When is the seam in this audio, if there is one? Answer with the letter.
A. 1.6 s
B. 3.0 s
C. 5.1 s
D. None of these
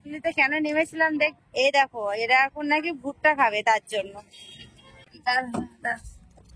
C